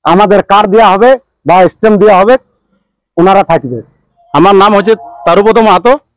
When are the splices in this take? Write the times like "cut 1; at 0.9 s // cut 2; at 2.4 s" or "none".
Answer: none